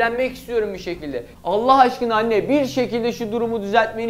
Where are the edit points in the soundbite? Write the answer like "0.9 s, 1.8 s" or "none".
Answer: none